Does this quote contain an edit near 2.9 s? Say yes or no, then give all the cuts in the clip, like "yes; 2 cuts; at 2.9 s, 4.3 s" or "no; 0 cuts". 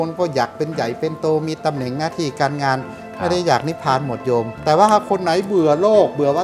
no; 1 cut; at 4.5 s